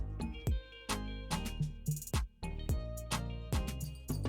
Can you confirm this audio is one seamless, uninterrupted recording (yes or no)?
no